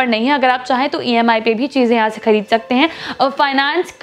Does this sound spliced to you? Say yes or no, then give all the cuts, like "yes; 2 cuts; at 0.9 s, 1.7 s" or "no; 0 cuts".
no; 0 cuts